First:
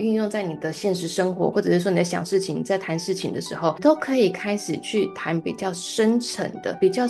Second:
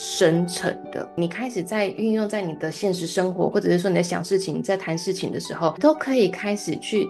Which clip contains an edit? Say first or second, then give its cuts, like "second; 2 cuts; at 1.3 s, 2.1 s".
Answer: second; 1 cut; at 1.1 s